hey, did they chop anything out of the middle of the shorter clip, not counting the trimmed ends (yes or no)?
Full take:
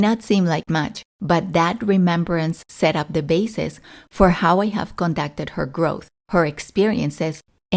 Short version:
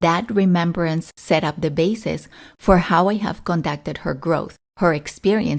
no